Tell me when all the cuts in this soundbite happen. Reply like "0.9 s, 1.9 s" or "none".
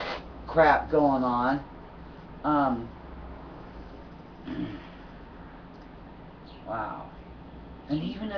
none